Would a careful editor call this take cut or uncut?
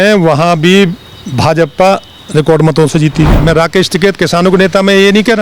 cut